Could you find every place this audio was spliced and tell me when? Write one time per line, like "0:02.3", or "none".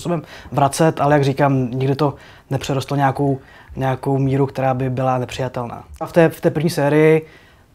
0:06.1